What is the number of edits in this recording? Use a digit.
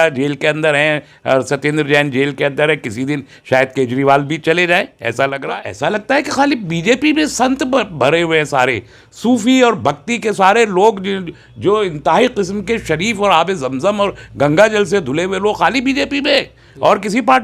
1